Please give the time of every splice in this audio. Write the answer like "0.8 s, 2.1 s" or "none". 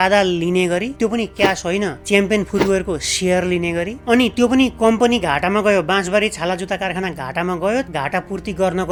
none